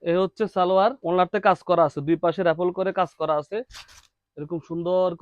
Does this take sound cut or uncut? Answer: cut